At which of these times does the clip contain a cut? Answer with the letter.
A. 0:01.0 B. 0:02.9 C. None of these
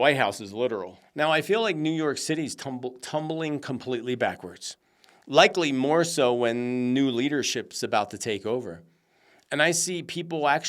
A